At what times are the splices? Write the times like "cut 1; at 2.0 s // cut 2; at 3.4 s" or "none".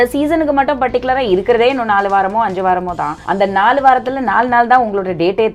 cut 1; at 3.1 s